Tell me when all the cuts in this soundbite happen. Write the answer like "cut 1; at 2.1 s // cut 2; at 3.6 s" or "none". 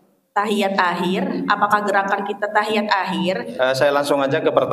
cut 1; at 3.5 s